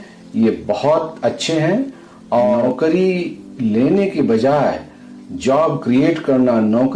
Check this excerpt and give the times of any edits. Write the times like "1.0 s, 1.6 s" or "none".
2.1 s